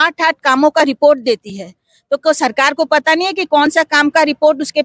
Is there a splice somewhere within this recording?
no; 0 cuts

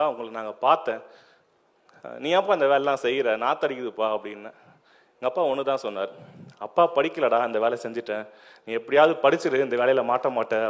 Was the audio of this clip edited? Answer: no; 0 cuts

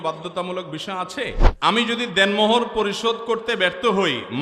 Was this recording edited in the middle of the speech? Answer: yes; 1 cut; at 1.5 s

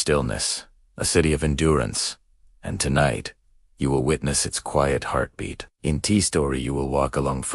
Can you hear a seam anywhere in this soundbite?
no; 0 cuts

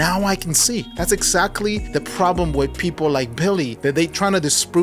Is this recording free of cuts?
no; 3 cuts; at 0.9 s, 1.8 s, 3.7 s

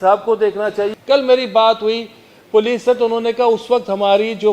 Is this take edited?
yes; 1 cut; at 0.9 s

